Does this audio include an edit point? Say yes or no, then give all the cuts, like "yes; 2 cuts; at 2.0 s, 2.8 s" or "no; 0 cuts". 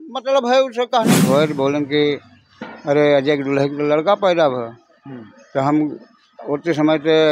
yes; 1 cut; at 1.2 s